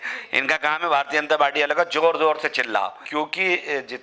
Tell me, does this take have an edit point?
yes; 1 cut; at 3.0 s

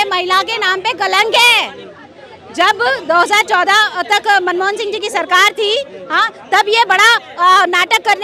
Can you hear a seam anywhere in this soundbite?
no; 0 cuts

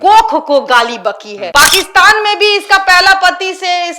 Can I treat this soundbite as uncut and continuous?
no; 1 cut; at 1.3 s

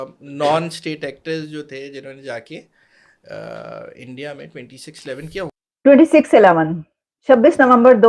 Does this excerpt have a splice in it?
yes; 1 cut; at 5.6 s

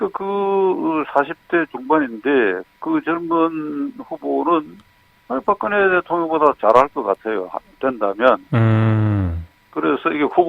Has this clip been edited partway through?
yes; 1 cut; at 5.9 s

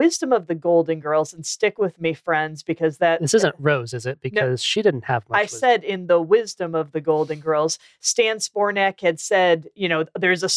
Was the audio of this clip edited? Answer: no; 0 cuts

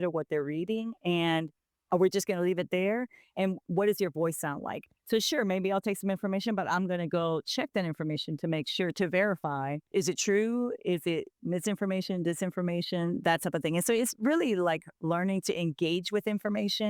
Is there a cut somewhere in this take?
yes; 1 cut; at 9.9 s

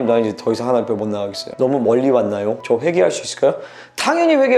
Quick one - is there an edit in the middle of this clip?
yes; 2 cuts; at 1.4 s, 2.6 s

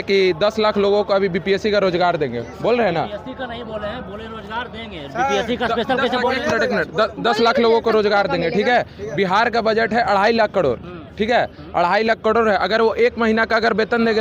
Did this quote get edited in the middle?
no; 0 cuts

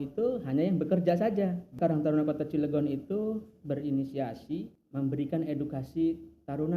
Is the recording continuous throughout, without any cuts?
no; 2 cuts; at 1.7 s, 4.8 s

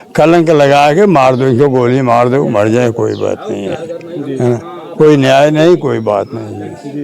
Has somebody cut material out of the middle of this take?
no; 0 cuts

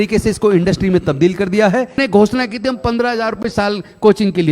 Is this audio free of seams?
no; 1 cut; at 2.0 s

